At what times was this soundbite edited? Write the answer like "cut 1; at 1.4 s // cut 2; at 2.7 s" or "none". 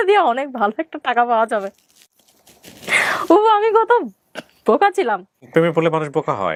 none

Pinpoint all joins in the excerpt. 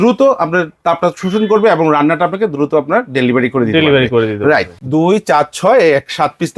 cut 1; at 4.8 s

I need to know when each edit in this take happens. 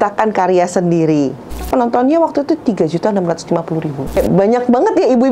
cut 1; at 1.6 s // cut 2; at 4.2 s

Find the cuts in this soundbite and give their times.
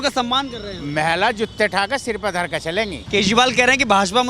cut 1; at 3.0 s

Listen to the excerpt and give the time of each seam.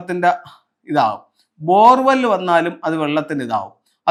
none

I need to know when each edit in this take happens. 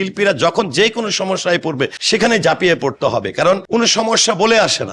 none

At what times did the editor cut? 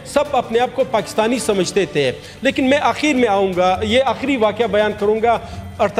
none

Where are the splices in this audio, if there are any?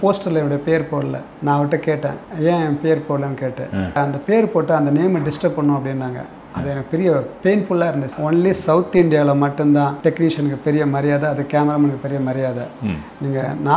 cut 1; at 1.3 s // cut 2; at 2.2 s // cut 3; at 4.0 s // cut 4; at 8.2 s // cut 5; at 9.9 s

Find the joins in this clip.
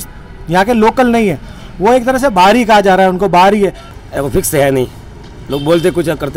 cut 1; at 3.9 s

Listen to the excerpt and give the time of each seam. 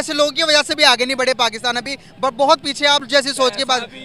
none

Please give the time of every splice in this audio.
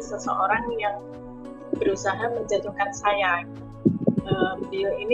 cut 1; at 3.7 s

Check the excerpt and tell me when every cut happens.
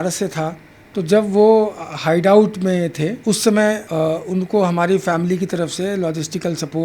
cut 1; at 3.2 s // cut 2; at 3.8 s

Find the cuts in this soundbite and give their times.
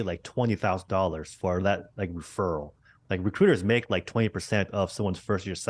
none

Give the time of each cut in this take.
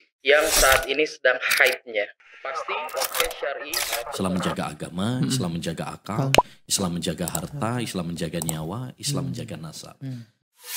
none

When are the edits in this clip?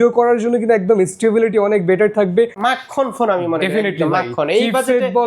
cut 1; at 2.6 s

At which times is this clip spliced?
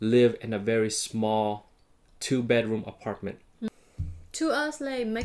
cut 1; at 3.7 s

